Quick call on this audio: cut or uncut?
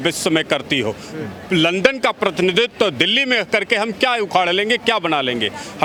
uncut